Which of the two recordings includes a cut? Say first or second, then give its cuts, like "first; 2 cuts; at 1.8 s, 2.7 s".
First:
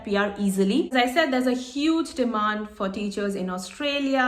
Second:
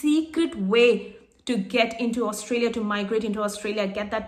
first; 1 cut; at 0.9 s